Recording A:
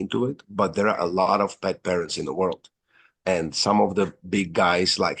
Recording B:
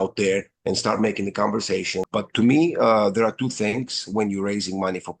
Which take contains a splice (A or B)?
B